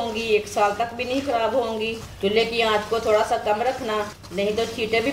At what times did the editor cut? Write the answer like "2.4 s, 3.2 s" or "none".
2.1 s, 4.2 s